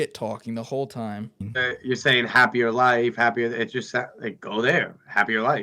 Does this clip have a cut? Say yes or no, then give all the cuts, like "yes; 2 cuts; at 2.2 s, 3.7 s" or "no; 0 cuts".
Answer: yes; 1 cut; at 1.5 s